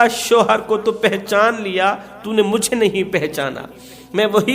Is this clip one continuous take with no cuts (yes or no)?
yes